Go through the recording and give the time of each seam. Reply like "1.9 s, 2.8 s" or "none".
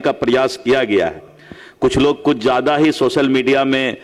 none